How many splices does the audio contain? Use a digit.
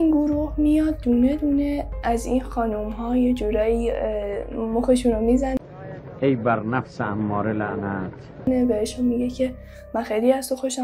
0